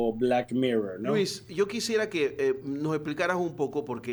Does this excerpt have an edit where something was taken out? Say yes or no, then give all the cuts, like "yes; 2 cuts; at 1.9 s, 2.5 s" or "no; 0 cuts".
no; 0 cuts